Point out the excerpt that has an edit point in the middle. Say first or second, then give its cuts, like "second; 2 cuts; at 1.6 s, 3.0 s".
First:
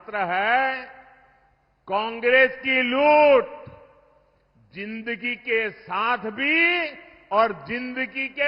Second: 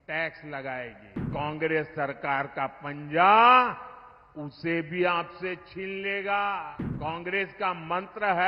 second; 2 cuts; at 1.3 s, 6.8 s